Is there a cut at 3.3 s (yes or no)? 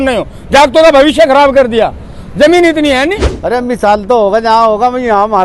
yes